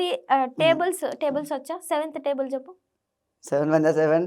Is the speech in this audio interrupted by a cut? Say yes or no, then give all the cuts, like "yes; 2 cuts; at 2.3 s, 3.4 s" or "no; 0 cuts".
no; 0 cuts